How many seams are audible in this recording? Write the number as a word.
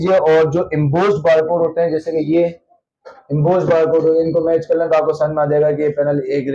zero